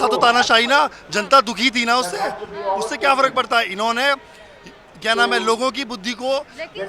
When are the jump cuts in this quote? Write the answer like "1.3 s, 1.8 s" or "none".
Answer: none

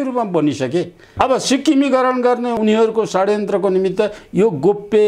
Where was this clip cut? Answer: 1.1 s, 2.6 s

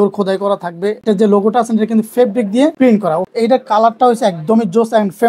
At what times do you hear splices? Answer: 1.0 s, 3.1 s

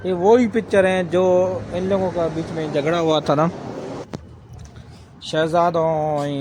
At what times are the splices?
none

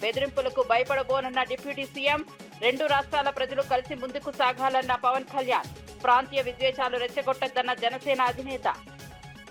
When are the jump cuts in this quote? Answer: none

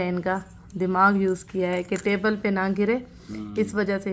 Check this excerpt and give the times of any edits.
none

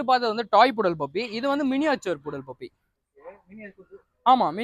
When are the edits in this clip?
none

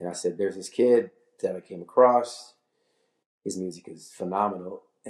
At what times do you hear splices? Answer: none

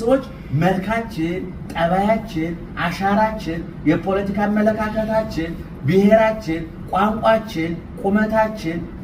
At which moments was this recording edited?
none

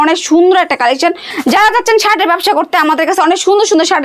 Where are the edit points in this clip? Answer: 1.3 s

